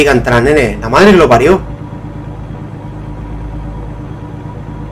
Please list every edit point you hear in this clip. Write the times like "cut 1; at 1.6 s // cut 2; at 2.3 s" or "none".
none